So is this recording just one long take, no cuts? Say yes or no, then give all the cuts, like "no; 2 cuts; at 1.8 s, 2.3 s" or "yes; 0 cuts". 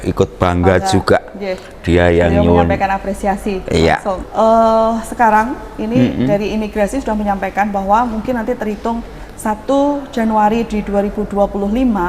no; 1 cut; at 4.2 s